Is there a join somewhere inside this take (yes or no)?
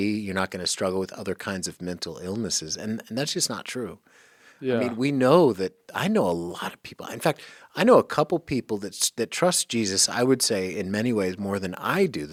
no